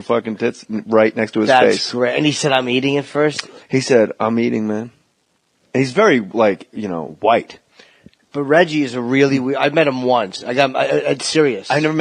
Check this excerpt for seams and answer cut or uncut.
cut